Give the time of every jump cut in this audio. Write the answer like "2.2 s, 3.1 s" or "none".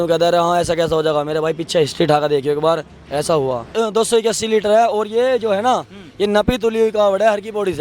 3.8 s